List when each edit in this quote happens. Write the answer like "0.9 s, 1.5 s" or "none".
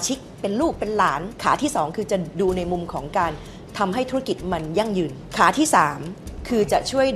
1.3 s, 5.2 s